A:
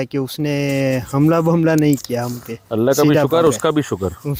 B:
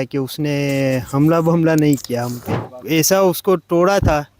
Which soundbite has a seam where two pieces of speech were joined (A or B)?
B